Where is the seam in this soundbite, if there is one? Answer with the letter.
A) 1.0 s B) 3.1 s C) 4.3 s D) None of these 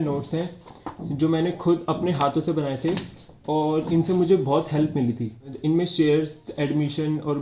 D